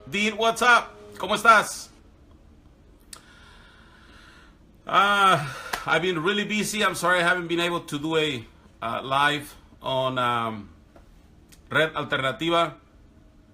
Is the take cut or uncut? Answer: cut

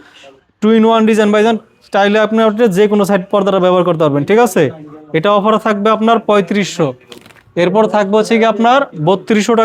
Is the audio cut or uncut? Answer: uncut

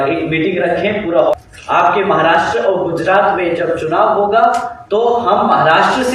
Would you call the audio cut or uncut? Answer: cut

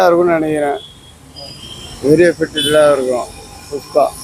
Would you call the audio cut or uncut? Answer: uncut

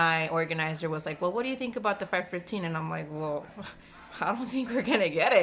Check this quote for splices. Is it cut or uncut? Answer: uncut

